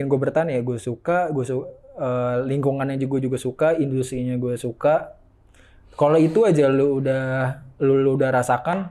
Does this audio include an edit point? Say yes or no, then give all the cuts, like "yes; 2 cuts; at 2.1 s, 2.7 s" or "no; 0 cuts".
no; 0 cuts